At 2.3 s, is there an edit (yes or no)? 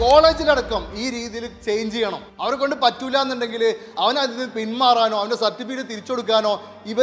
yes